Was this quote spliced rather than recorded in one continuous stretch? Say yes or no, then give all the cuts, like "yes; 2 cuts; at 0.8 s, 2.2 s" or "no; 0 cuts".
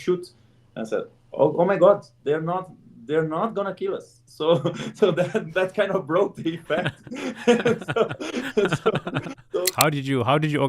yes; 1 cut; at 9.7 s